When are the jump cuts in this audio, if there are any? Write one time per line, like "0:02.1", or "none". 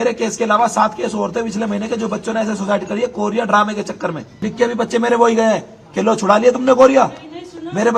0:04.4